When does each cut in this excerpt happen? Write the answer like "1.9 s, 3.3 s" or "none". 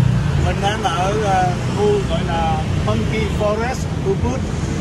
none

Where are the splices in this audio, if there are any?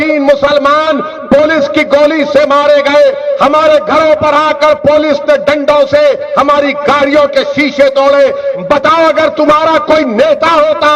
none

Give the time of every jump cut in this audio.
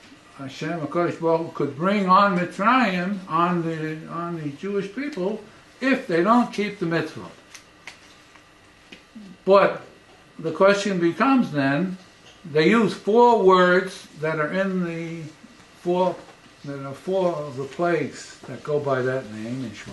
13.4 s

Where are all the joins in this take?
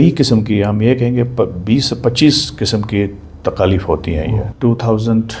4.4 s

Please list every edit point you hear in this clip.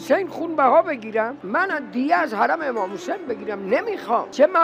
none

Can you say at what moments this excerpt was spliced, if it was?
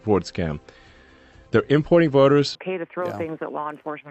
2.6 s

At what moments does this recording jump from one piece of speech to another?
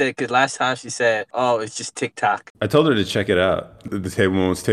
1.3 s, 2.5 s, 3.9 s

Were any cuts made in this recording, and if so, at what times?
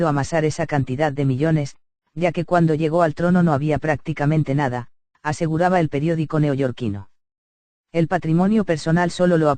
5.8 s

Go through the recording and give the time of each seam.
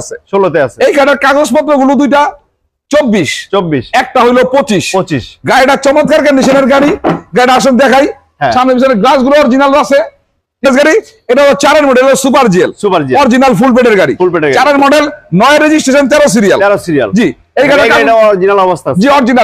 10.6 s

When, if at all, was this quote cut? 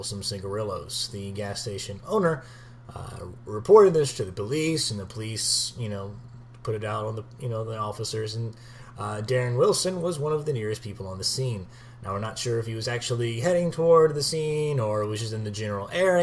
1.6 s

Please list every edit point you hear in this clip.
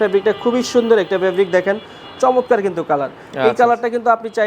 none

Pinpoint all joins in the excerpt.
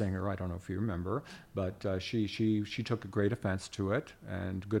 none

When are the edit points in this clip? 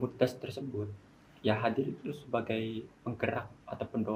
none

